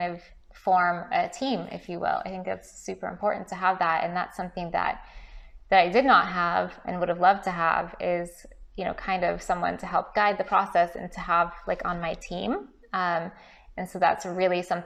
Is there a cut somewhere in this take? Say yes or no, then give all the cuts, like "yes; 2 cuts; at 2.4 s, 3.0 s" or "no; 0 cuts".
no; 0 cuts